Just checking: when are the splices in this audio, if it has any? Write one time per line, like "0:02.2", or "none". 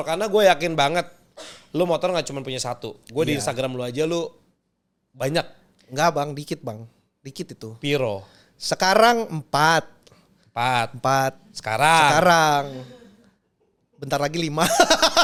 none